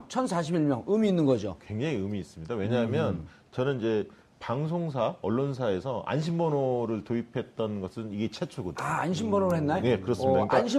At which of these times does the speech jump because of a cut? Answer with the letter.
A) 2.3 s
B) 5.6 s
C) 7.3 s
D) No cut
B